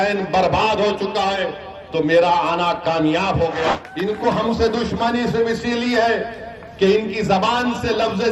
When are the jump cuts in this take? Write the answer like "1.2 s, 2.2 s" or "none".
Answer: 3.7 s